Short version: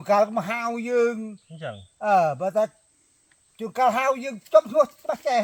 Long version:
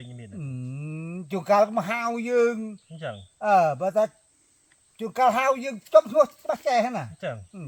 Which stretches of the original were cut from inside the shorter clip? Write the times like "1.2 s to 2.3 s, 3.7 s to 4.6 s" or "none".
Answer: none

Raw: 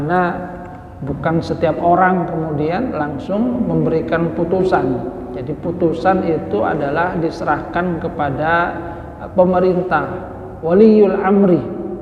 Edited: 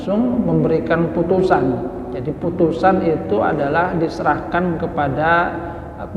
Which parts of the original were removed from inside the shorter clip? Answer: none

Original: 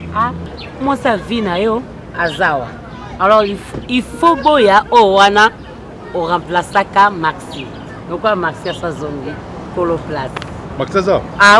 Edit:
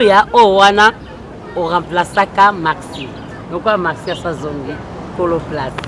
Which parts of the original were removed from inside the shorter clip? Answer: none

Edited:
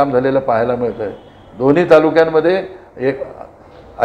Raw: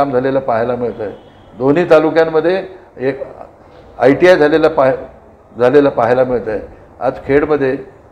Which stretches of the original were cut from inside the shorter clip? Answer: none

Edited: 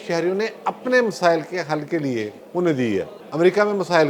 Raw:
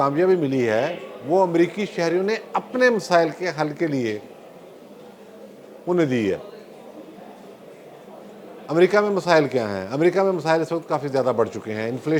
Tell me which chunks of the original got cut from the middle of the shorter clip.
4.3 s to 5.7 s, 6.5 s to 8.6 s

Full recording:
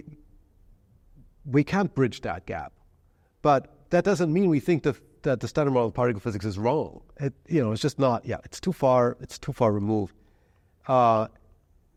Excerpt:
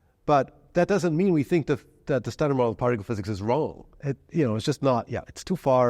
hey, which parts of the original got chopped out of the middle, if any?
none

